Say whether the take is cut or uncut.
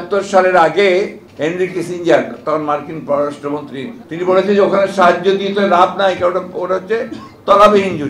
cut